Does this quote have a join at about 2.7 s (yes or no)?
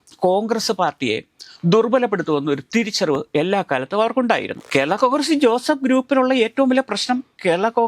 no